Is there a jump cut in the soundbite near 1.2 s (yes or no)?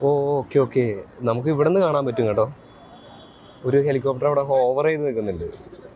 no